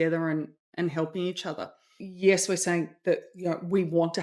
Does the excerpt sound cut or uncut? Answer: cut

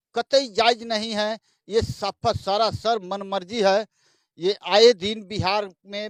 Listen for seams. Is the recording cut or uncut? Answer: uncut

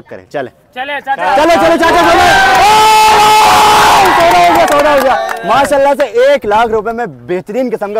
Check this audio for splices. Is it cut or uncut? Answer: uncut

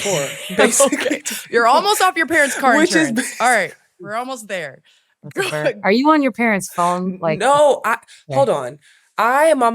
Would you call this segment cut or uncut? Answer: uncut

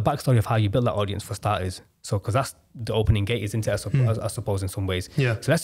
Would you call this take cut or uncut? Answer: uncut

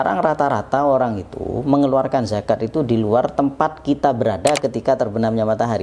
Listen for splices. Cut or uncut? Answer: uncut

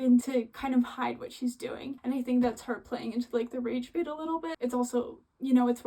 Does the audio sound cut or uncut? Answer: cut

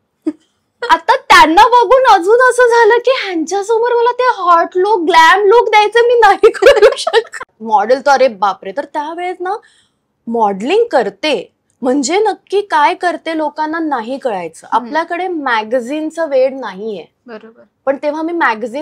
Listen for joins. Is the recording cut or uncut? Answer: cut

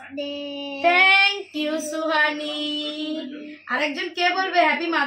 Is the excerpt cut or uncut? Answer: uncut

